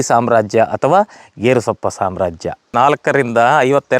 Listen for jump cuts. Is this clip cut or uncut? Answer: cut